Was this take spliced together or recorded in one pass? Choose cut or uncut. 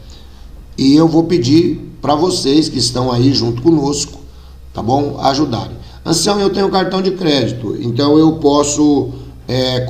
uncut